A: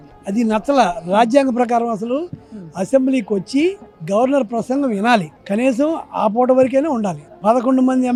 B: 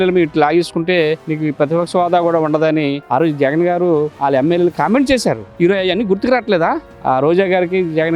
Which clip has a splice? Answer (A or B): B